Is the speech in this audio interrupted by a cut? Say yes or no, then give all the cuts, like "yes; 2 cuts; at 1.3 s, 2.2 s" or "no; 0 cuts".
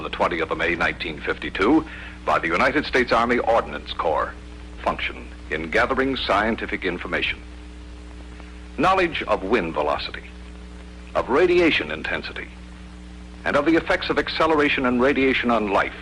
no; 0 cuts